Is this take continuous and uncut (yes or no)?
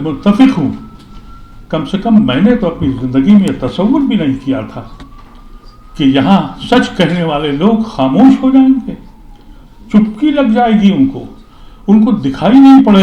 yes